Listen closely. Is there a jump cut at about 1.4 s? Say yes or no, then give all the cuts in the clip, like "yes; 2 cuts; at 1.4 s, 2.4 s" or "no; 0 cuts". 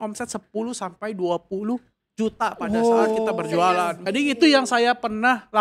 no; 1 cut; at 3.9 s